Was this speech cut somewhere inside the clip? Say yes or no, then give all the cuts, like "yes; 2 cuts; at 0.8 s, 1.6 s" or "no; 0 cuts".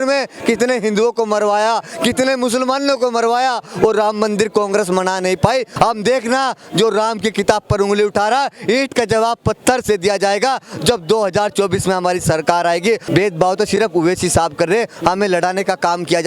yes; 2 cuts; at 5.7 s, 13.0 s